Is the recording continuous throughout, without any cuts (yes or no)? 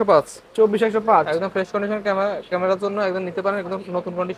yes